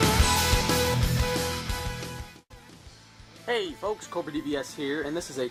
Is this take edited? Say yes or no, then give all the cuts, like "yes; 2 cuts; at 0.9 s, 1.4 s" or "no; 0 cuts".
no; 0 cuts